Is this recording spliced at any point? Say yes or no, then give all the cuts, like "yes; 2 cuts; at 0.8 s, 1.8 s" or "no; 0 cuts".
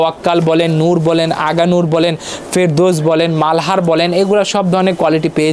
no; 0 cuts